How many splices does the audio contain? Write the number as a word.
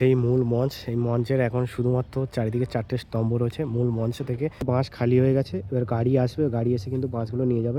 one